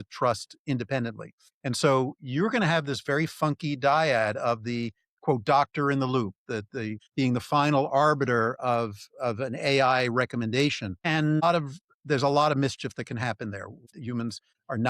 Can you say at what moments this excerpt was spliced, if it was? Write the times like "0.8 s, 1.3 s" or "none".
13.9 s